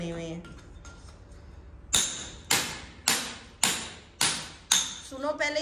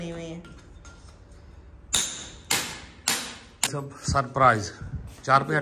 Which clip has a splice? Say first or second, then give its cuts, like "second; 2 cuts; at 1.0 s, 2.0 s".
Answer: second; 1 cut; at 3.7 s